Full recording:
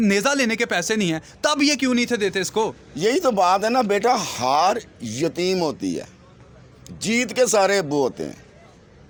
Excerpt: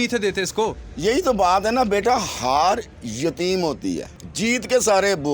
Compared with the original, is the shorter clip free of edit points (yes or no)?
no